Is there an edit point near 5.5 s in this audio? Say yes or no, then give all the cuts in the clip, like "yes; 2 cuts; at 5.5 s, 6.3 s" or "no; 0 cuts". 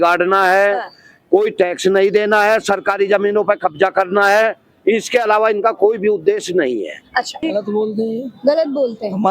no; 1 cut; at 7.4 s